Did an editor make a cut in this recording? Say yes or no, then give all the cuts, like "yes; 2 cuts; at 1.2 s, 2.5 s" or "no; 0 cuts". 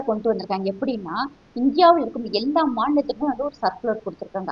no; 0 cuts